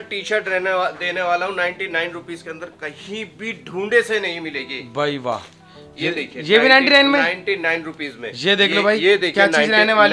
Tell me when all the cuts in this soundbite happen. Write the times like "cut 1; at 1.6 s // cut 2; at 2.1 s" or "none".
none